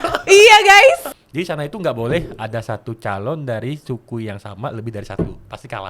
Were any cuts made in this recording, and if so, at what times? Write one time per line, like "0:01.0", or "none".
0:01.1